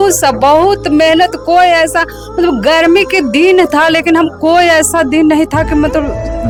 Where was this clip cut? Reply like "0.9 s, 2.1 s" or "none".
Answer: none